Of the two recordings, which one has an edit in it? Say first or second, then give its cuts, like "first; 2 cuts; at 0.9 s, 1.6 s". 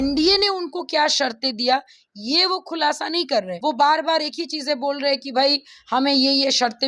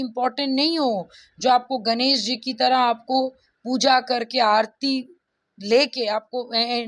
first; 1 cut; at 3.5 s